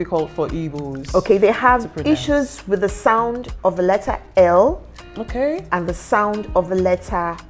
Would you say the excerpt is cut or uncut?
uncut